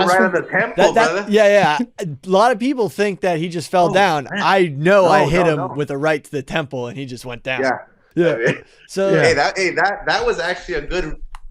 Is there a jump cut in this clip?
yes; 1 cut; at 8.0 s

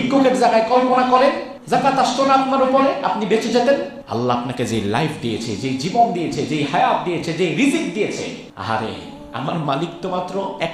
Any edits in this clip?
yes; 3 cuts; at 1.5 s, 4.0 s, 8.5 s

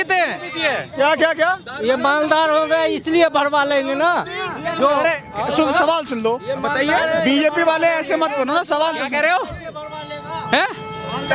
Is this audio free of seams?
yes; 0 cuts

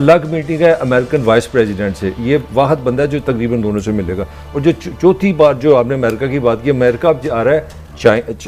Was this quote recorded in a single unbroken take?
yes; 0 cuts

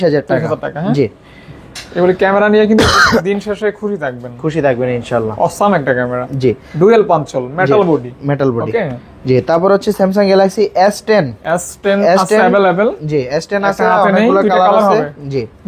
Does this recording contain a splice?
no; 0 cuts

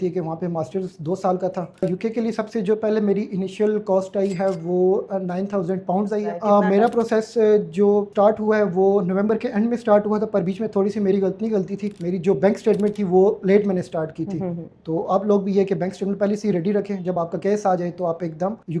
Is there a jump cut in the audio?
yes; 2 cuts; at 1.7 s, 6.3 s

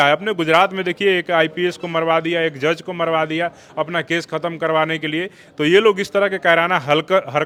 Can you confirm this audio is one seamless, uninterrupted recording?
yes; 0 cuts

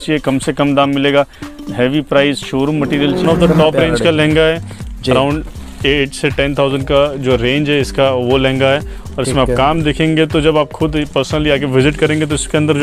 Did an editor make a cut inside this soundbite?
yes; 1 cut; at 3.2 s

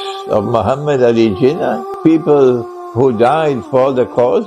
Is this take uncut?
no; 1 cut; at 1.9 s

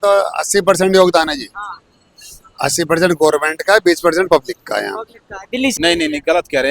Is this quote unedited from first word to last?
no; 1 cut; at 5.7 s

